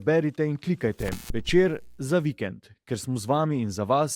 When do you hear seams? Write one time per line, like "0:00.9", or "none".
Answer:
none